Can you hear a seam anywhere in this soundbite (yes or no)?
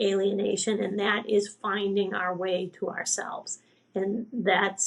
no